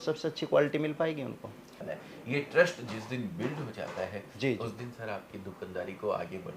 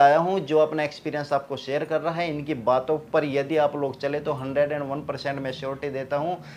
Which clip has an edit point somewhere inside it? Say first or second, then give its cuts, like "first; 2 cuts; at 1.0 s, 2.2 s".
first; 1 cut; at 1.8 s